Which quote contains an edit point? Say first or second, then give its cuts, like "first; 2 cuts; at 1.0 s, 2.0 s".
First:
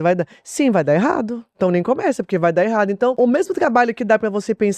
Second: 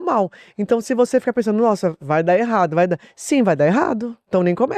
first; 1 cut; at 3.1 s